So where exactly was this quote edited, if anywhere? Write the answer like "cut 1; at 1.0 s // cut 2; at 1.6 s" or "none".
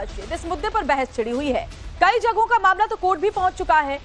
cut 1; at 1.8 s